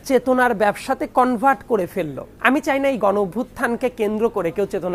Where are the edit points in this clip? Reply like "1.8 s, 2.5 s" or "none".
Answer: 2.2 s

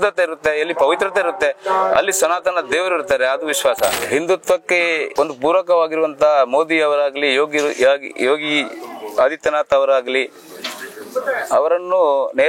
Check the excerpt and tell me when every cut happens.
3.9 s, 5.1 s

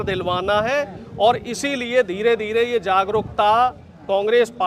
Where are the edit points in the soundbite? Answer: none

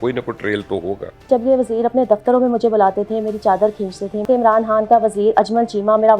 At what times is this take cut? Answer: 1.3 s, 4.2 s

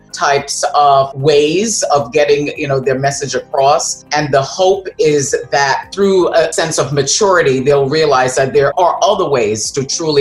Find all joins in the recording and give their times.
4.0 s, 6.5 s, 8.7 s

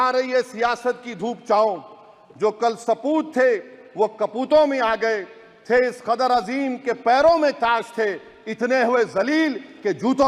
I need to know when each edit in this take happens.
none

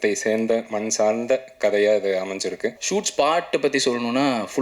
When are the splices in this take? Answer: 2.8 s

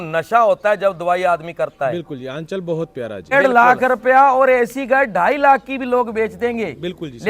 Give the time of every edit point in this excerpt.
3.3 s

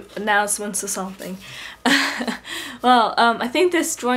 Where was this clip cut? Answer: 1.7 s

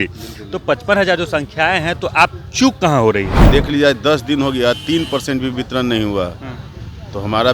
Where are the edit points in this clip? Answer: 3.4 s

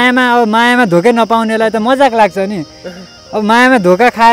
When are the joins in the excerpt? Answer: none

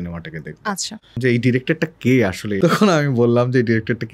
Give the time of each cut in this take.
1.2 s, 2.5 s

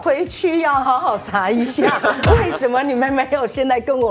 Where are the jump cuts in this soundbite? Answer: none

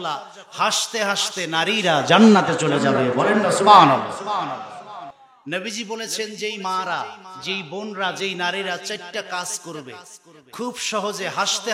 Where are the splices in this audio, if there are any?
5.1 s

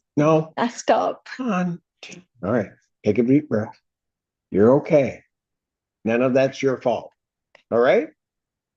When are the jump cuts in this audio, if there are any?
none

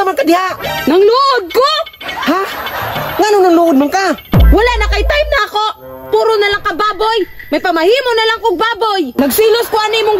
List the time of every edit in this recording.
9.1 s

